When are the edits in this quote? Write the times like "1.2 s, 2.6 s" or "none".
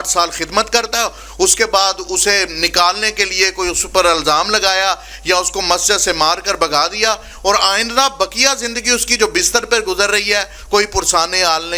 none